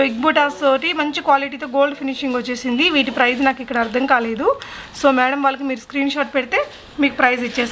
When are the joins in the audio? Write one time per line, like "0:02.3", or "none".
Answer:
none

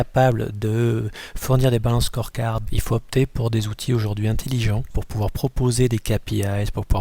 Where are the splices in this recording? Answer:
0:02.6
0:05.0

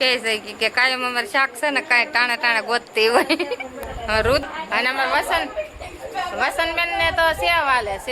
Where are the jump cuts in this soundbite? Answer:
0:04.4

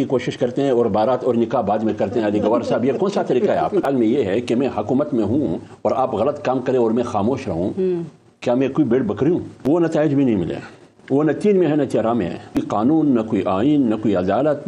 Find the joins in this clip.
0:03.8
0:09.6
0:12.6

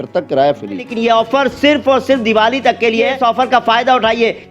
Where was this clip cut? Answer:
0:00.9
0:03.1

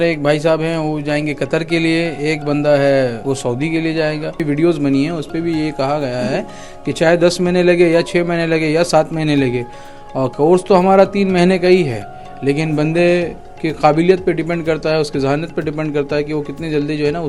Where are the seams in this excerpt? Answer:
0:03.2
0:04.4

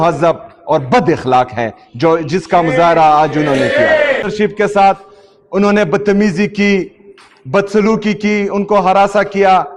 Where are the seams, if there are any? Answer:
0:04.3

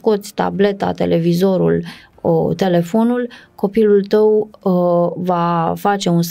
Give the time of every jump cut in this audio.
none

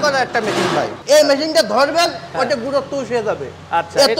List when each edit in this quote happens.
0:01.0

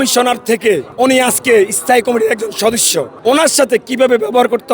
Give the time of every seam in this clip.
0:00.9
0:03.1

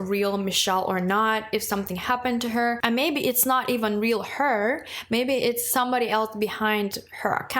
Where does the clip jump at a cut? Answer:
0:02.8

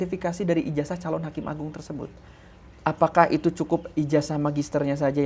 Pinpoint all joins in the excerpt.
none

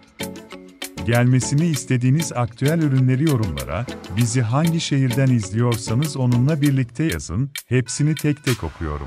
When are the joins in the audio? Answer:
0:01.0

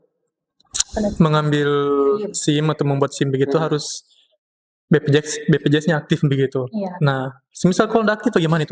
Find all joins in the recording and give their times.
none

